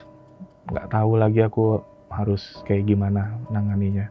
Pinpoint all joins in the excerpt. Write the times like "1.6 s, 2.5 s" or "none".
none